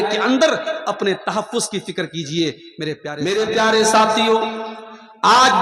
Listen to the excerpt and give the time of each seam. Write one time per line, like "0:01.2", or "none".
0:03.0